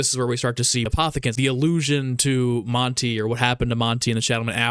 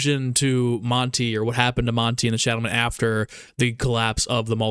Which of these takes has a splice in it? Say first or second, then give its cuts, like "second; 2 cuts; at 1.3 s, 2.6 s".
first; 1 cut; at 0.9 s